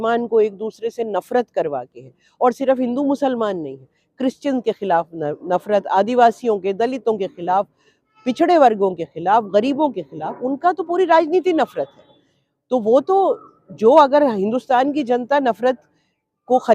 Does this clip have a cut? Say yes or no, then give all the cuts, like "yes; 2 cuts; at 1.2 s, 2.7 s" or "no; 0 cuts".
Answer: no; 0 cuts